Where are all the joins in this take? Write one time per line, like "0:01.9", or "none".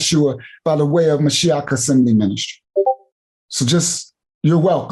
0:02.5